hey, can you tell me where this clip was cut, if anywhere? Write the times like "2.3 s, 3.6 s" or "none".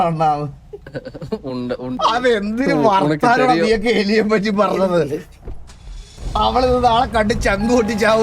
2.0 s